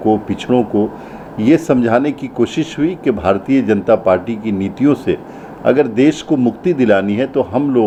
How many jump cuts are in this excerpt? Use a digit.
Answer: 0